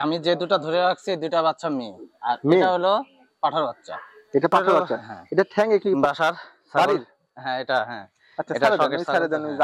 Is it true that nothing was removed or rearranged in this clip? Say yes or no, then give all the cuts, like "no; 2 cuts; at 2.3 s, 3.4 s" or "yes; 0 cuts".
no; 1 cut; at 6.0 s